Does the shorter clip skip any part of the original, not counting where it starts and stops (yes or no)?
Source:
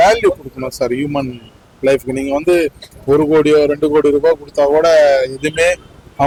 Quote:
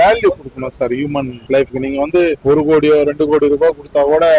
yes